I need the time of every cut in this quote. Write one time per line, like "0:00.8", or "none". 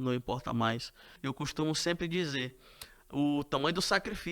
0:01.1